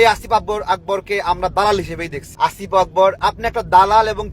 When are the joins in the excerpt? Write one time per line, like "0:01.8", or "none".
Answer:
0:02.2
0:03.2